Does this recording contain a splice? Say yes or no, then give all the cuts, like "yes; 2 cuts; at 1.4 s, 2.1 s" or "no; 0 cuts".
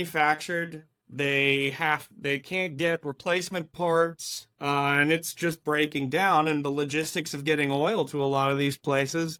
no; 0 cuts